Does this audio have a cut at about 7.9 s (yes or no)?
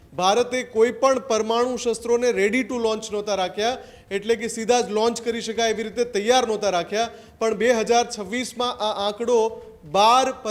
no